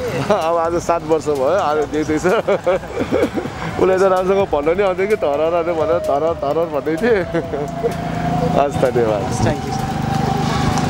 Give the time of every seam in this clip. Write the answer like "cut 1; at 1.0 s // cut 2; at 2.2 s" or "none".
none